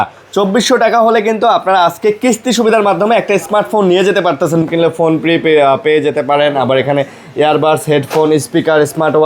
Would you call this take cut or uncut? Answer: cut